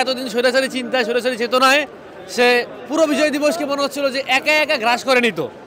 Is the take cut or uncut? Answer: uncut